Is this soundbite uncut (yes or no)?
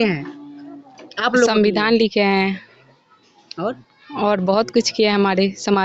yes